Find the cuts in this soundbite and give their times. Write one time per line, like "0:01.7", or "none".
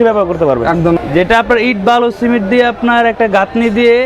0:01.0